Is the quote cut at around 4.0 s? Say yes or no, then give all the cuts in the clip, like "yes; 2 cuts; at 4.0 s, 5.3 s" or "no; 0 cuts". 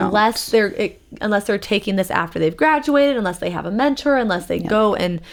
no; 0 cuts